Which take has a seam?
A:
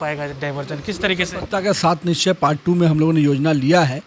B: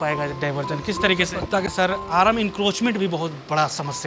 B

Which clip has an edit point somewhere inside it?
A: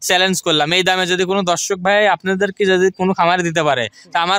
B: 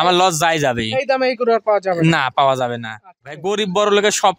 B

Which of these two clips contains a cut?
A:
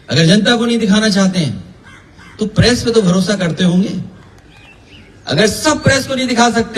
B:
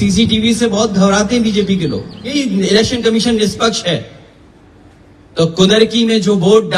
B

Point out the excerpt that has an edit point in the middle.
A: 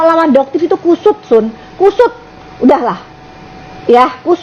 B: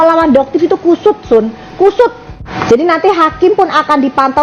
B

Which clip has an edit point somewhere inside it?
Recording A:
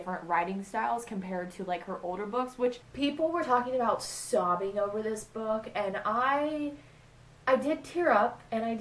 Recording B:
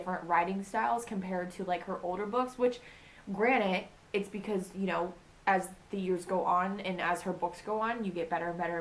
A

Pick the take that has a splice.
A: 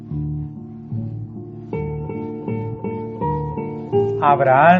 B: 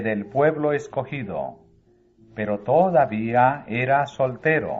B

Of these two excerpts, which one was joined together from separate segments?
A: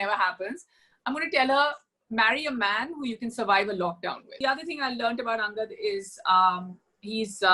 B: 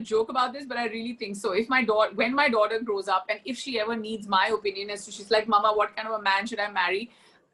A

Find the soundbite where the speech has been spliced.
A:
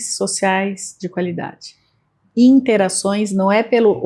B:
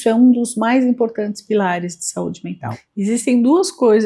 B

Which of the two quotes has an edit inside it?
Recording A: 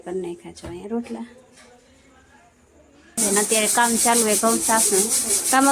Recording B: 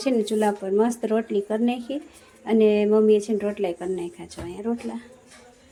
A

